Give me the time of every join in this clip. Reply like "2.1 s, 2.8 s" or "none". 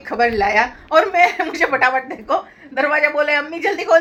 none